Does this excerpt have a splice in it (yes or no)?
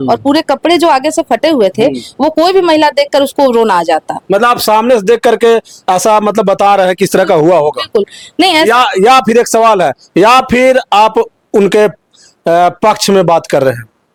no